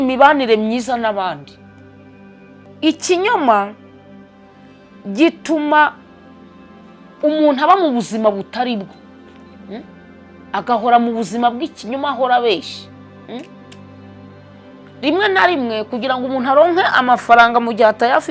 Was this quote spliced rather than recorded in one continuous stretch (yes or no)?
yes